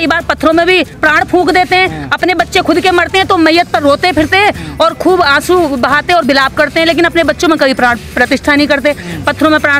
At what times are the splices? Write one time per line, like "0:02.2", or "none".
0:01.0